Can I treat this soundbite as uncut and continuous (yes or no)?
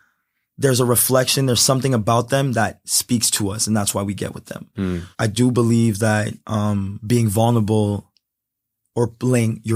no